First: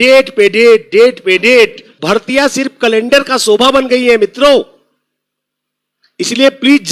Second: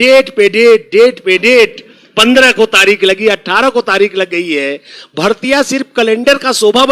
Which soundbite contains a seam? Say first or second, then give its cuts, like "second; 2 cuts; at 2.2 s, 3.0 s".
first; 1 cut; at 1.9 s